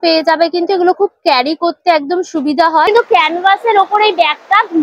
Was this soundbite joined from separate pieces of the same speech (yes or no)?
yes